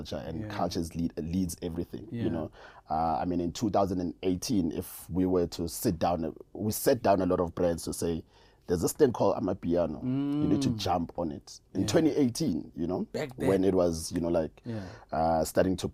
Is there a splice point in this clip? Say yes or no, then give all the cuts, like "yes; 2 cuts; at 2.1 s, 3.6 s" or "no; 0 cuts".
no; 0 cuts